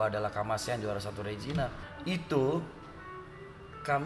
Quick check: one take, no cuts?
no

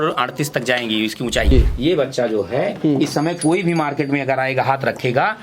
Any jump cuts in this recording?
yes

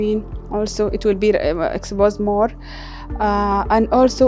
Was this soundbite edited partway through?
no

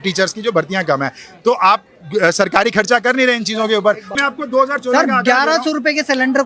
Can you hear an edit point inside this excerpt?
yes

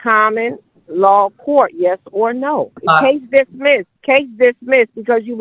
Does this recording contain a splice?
yes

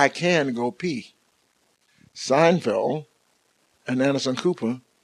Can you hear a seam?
no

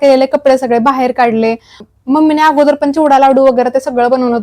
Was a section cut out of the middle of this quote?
yes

